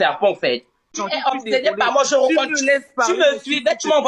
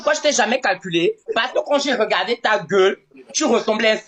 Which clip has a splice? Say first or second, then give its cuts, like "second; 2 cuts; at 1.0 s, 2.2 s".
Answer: first; 1 cut; at 0.9 s